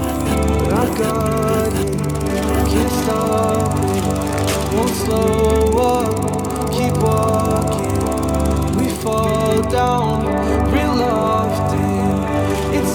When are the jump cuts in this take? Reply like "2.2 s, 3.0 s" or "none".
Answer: none